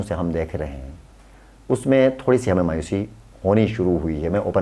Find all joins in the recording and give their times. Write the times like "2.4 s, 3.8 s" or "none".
none